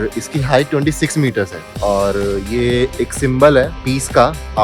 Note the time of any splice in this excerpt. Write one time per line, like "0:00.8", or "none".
0:01.6
0:03.8

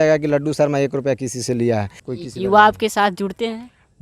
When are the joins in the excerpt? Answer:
0:02.0

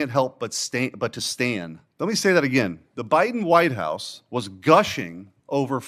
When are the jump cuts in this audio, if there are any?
0:01.8

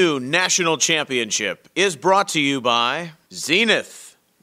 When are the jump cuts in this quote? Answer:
0:03.1

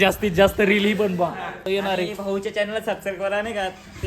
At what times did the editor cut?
0:01.7

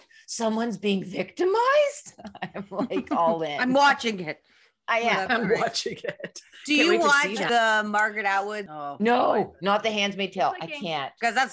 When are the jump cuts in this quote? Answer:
none

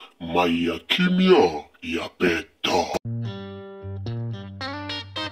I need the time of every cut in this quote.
0:03.0

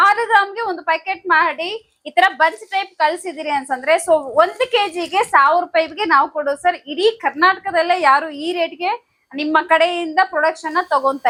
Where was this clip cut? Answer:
none

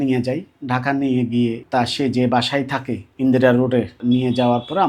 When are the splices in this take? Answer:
0:01.6
0:03.9

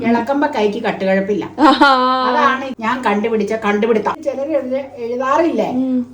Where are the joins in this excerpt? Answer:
0:02.7
0:04.1

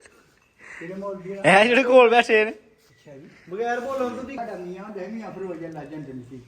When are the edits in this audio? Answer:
0:04.3

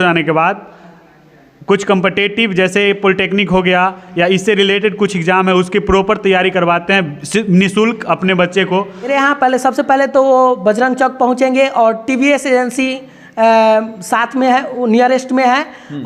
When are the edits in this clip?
0:09.1

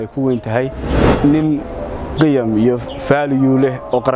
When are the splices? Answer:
0:01.0

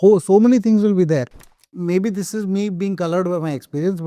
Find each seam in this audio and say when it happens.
0:01.4

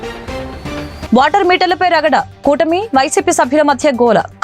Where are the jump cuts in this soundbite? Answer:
0:01.0

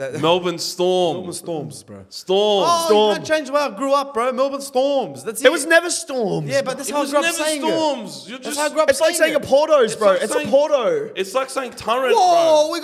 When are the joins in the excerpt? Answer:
none

